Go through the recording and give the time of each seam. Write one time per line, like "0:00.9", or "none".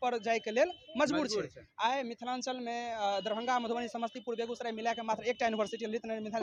none